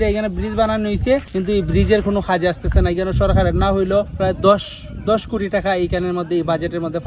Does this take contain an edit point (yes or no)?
yes